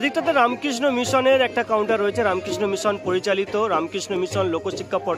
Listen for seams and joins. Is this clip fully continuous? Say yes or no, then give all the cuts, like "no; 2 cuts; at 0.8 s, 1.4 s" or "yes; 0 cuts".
yes; 0 cuts